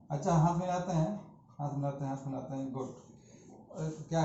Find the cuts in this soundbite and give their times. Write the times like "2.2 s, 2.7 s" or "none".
none